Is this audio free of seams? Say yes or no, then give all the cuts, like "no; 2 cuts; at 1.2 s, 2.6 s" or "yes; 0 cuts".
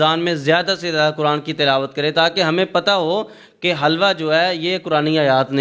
yes; 0 cuts